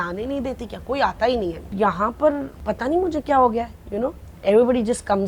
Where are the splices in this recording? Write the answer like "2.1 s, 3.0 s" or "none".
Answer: 1.7 s, 2.5 s